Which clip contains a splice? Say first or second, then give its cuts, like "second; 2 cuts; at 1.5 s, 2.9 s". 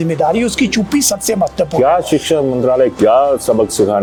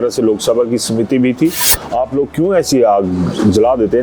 second; 1 cut; at 1.7 s